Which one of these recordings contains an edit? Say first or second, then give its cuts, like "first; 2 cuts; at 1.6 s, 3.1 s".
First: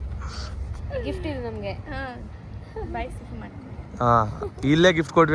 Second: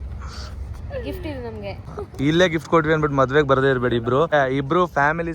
second; 2 cuts; at 1.9 s, 4.3 s